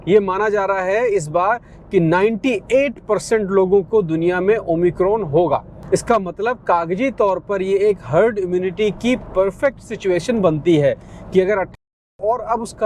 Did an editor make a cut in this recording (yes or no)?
yes